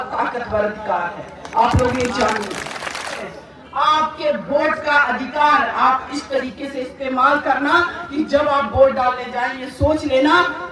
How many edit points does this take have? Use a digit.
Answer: 1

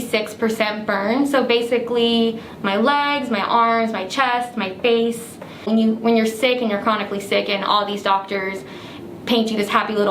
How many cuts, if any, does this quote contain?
1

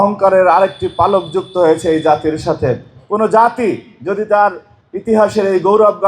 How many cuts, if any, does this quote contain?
1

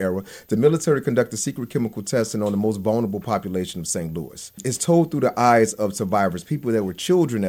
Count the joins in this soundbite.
0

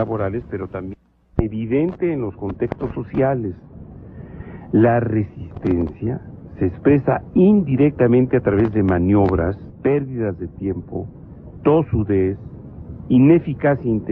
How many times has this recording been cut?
1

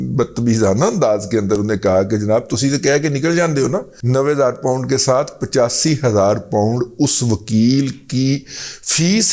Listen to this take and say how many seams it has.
1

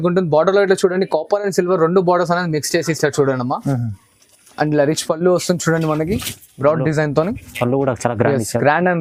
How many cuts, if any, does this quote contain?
0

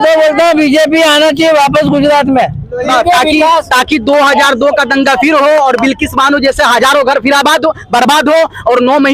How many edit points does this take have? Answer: 1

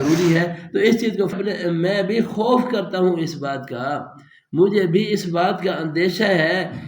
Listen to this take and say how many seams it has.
1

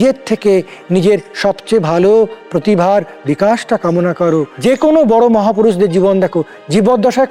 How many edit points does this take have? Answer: 1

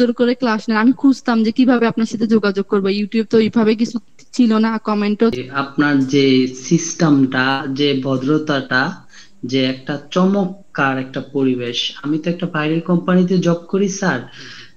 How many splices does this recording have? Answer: 1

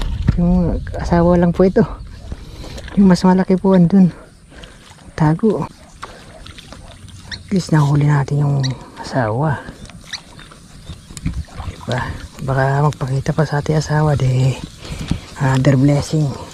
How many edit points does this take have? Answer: 1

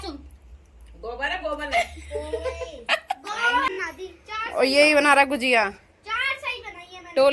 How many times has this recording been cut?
1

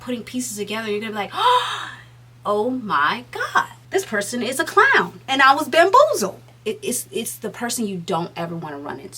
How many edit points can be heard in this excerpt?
3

